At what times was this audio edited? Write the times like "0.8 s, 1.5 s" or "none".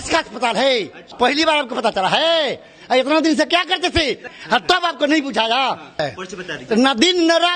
1.1 s, 4.3 s, 6.0 s